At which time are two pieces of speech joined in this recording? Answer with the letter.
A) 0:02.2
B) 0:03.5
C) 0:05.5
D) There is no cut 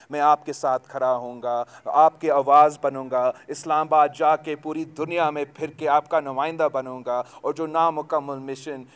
D